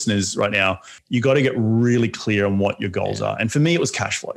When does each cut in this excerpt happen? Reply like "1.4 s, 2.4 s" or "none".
0.9 s